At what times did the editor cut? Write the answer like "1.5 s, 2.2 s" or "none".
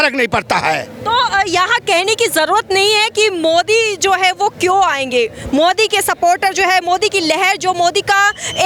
none